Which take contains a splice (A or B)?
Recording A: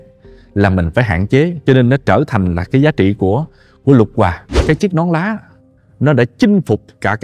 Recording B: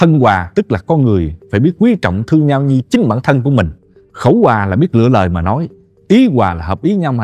A